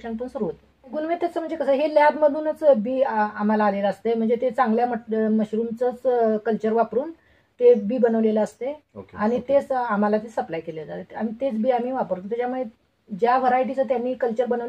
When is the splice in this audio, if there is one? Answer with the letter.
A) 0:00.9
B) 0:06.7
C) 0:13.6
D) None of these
A